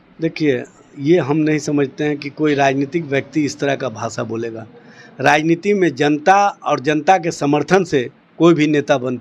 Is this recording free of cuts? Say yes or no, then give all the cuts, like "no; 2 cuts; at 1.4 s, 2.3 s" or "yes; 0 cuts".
yes; 0 cuts